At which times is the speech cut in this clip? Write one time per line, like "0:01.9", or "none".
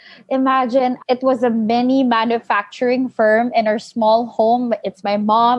0:01.0